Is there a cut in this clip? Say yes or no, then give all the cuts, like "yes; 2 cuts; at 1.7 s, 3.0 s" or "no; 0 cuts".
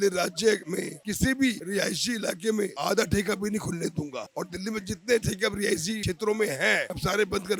no; 0 cuts